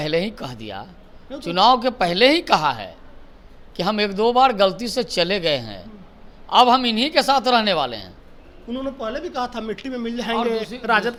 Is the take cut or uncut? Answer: uncut